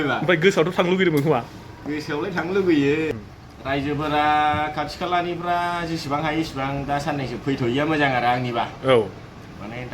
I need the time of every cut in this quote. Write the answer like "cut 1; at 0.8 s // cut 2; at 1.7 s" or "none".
cut 1; at 3.1 s